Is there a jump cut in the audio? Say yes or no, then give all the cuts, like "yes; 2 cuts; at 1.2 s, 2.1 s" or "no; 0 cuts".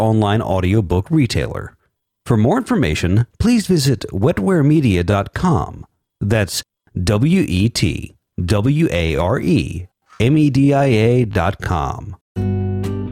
yes; 1 cut; at 12.2 s